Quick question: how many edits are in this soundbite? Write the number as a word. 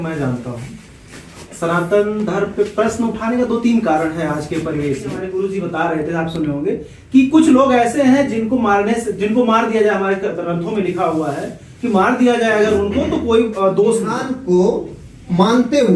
two